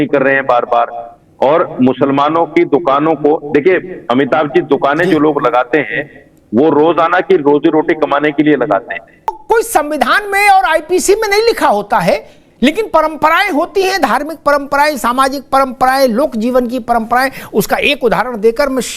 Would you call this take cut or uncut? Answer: cut